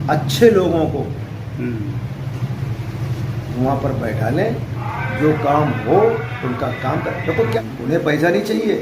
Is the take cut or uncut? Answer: cut